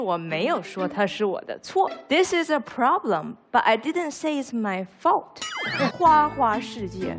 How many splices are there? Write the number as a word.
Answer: two